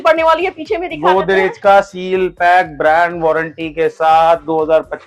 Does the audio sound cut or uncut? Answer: uncut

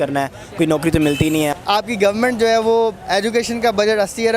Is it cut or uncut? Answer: cut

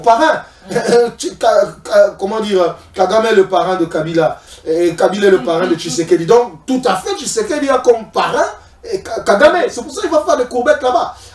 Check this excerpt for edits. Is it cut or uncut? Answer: uncut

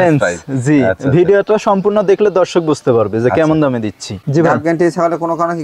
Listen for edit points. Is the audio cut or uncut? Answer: cut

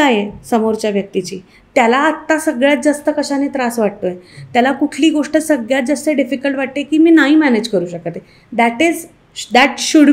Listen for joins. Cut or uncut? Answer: uncut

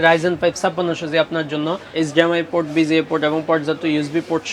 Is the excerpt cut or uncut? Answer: cut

